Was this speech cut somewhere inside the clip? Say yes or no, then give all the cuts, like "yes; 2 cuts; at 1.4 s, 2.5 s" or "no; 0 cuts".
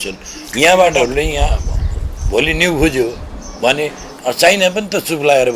yes; 1 cut; at 1.0 s